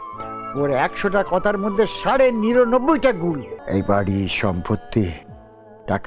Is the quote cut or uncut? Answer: cut